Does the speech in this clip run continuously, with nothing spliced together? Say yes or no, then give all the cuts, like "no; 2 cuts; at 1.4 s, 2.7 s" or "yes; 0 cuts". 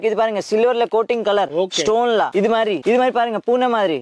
no; 1 cut; at 2.5 s